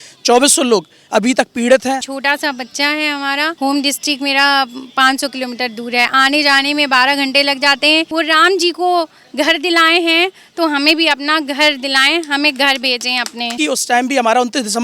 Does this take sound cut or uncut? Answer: cut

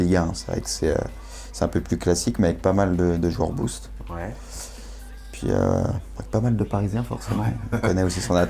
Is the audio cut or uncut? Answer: cut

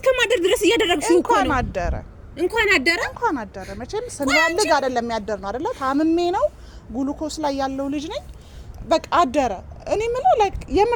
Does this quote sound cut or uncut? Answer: uncut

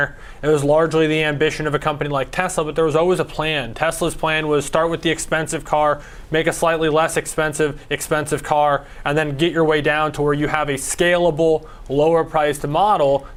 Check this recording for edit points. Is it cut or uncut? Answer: uncut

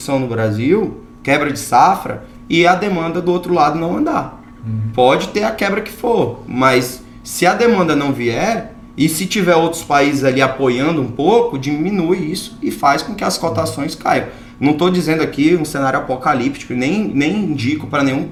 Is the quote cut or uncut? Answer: uncut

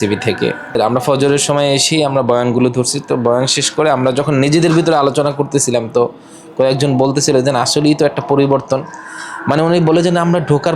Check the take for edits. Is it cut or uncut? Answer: uncut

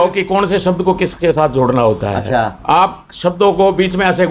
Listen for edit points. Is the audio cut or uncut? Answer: uncut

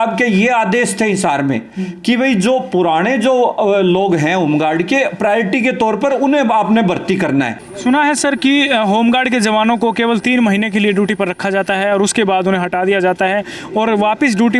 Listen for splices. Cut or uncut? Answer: cut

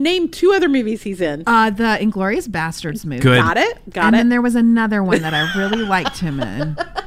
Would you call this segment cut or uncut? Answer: uncut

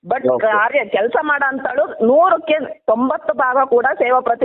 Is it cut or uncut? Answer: uncut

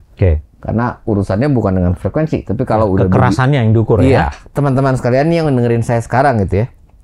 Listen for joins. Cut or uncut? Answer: cut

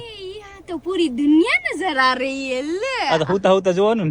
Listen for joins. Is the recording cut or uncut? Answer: uncut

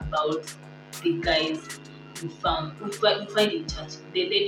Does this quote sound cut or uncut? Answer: uncut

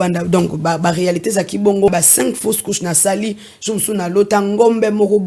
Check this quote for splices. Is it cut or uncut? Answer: cut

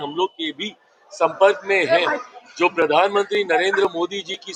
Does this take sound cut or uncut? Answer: uncut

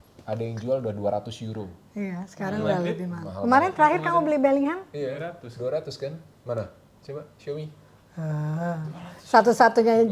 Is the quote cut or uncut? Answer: uncut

